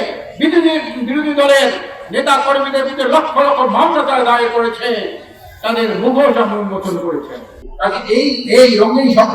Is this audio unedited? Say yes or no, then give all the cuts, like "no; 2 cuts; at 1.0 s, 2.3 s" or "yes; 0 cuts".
no; 1 cut; at 7.7 s